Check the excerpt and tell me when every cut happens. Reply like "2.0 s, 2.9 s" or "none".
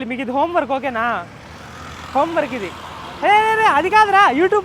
none